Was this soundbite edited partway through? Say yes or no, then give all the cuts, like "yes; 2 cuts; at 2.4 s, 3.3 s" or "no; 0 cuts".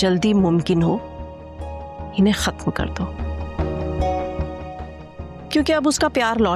no; 0 cuts